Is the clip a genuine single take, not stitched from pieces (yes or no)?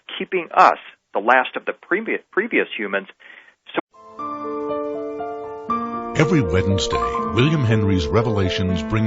yes